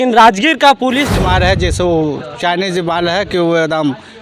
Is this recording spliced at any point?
yes; 1 cut; at 1.1 s

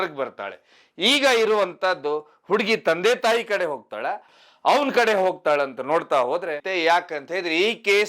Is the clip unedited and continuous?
no; 2 cuts; at 4.2 s, 6.6 s

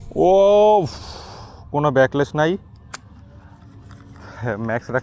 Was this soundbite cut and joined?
no; 0 cuts

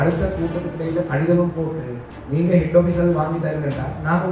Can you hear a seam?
no; 0 cuts

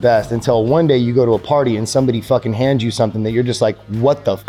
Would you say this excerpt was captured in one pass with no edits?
yes; 0 cuts

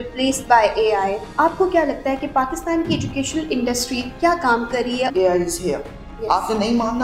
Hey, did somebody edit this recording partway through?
yes; 3 cuts; at 1.2 s, 4.1 s, 5.1 s

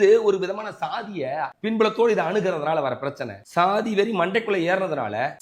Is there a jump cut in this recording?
yes; 1 cut; at 1.5 s

